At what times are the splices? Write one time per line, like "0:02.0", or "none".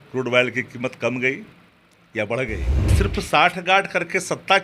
0:02.9